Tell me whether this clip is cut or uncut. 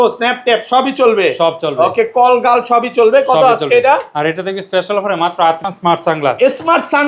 cut